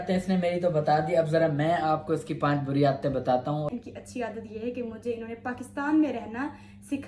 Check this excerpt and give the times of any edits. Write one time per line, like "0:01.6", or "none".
0:03.7